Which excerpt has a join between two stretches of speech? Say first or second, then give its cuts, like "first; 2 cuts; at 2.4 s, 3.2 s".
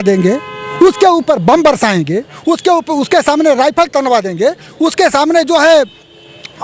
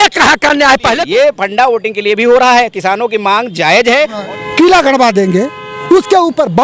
second; 2 cuts; at 1.0 s, 4.2 s